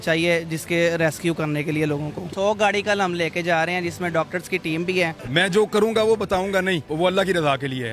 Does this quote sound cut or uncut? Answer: cut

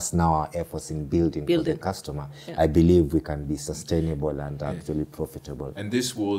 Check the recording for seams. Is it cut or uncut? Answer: uncut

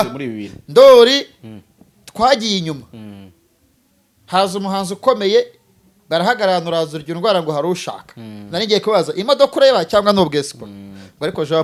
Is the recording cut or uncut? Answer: uncut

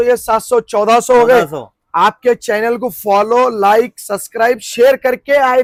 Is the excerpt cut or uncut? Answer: uncut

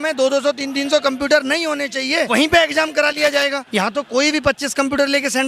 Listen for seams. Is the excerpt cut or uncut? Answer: cut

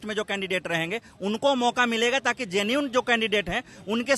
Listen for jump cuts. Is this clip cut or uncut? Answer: uncut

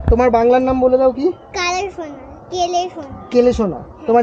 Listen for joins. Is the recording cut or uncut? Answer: uncut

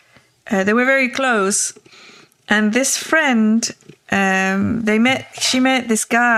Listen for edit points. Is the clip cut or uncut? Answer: uncut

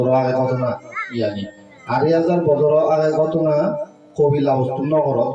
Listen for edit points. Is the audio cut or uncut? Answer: uncut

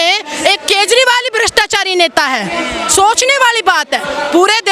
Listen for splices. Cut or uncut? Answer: uncut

